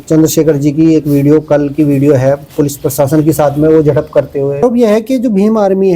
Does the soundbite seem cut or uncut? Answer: cut